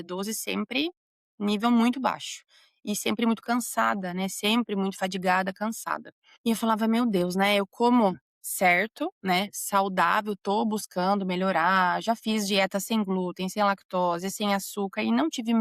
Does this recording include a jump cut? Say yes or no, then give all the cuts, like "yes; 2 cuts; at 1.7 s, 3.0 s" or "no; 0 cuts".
no; 0 cuts